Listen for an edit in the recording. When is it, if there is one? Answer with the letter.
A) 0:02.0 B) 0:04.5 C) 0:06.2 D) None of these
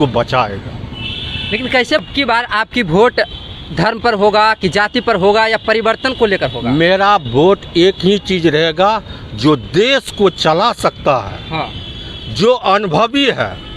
A